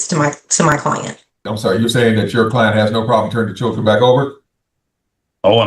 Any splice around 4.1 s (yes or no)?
no